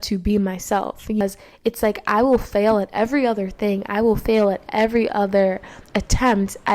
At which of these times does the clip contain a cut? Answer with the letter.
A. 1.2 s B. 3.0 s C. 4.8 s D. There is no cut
A